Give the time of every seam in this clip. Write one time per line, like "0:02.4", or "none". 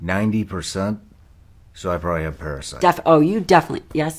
none